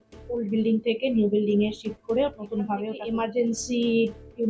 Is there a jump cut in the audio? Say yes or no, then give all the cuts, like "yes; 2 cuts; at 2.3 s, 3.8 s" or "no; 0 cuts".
yes; 1 cut; at 3.0 s